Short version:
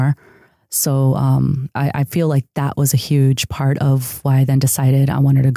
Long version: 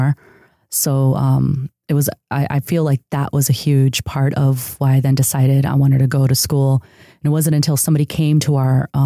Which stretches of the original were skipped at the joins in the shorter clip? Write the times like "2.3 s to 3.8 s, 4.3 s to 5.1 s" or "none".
1.7 s to 2.2 s